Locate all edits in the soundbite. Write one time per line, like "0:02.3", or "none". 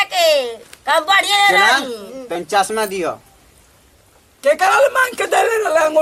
none